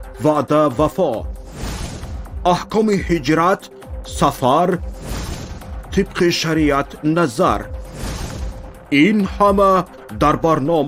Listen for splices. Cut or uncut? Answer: uncut